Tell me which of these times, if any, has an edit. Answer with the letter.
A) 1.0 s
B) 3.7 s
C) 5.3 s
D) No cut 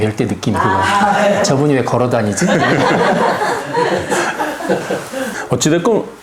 D